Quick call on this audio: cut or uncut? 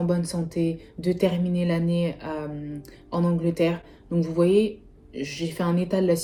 uncut